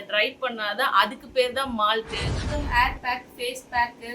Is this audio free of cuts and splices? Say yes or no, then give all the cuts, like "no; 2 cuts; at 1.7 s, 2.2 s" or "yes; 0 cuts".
no; 1 cut; at 2.3 s